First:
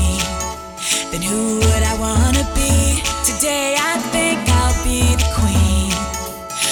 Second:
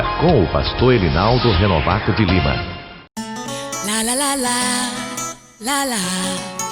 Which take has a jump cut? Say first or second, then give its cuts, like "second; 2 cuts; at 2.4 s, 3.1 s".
second; 1 cut; at 2.9 s